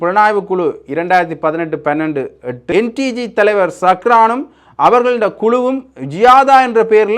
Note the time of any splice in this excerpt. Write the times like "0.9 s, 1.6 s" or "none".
2.6 s